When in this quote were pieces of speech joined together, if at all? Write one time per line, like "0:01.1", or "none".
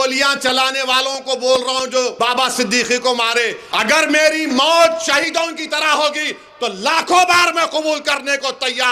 0:02.1
0:03.9